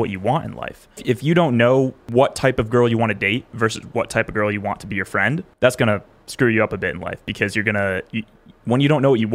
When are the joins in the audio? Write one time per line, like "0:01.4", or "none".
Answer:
0:01.0
0:02.0
0:05.5